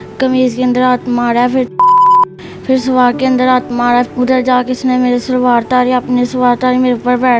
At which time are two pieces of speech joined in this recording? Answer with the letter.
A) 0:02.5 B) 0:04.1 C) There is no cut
B